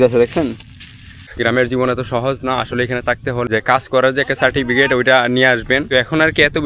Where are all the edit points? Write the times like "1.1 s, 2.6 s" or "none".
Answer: 1.2 s, 3.5 s, 5.8 s